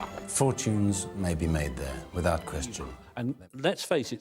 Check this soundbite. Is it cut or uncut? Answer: cut